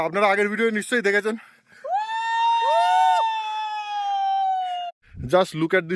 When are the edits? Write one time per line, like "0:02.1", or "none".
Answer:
0:04.9